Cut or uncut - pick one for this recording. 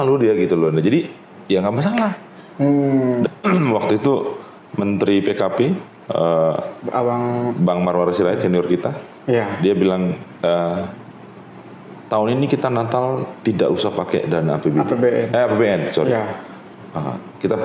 cut